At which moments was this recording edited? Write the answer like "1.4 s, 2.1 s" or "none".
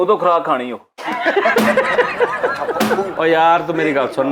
3.1 s